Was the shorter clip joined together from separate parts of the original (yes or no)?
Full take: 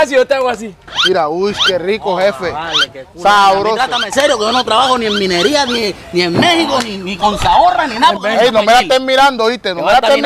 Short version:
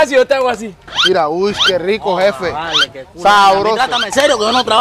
no